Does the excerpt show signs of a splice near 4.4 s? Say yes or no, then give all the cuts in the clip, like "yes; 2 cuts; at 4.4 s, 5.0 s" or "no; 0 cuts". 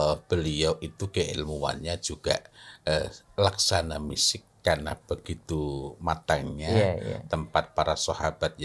no; 0 cuts